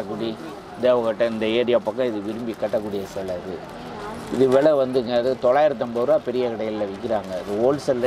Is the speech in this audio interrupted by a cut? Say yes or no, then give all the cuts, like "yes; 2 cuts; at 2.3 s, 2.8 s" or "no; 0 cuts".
no; 0 cuts